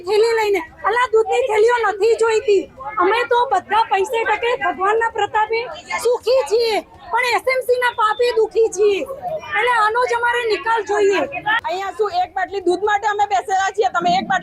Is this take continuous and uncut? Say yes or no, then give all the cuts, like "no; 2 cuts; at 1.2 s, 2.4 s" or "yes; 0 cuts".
yes; 0 cuts